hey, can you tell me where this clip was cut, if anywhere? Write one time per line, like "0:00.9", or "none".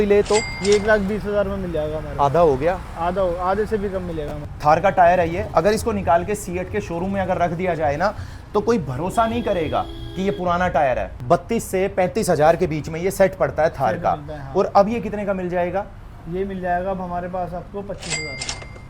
0:04.4
0:11.1